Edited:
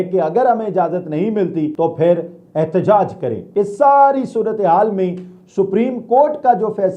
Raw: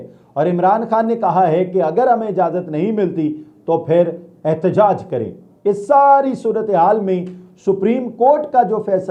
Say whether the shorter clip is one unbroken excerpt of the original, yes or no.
no